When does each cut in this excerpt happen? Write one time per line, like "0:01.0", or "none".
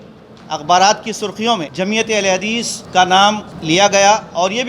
0:01.7
0:02.8
0:03.5